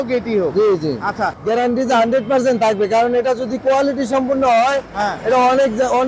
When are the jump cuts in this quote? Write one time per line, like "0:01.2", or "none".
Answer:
0:01.4